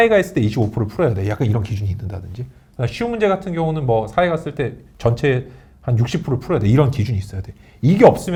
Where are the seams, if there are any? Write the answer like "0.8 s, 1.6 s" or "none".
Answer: none